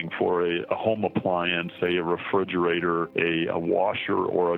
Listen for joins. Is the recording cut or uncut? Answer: cut